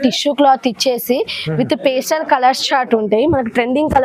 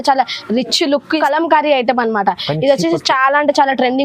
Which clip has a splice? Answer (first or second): second